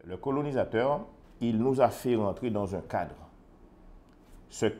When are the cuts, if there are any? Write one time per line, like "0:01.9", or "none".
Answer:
0:01.2